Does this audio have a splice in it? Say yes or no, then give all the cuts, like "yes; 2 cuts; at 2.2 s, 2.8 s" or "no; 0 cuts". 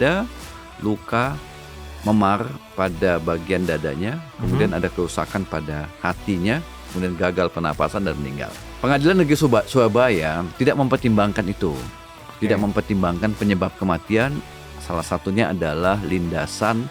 yes; 1 cut; at 8.6 s